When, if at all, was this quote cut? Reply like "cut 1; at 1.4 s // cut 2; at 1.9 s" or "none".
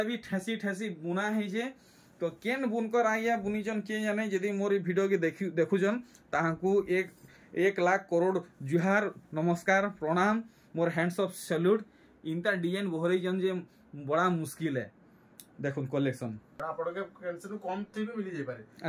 cut 1; at 16.5 s